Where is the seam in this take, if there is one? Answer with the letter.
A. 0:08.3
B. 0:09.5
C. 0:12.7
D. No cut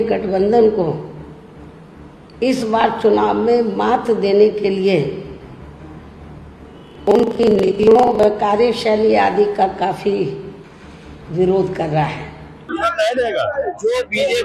C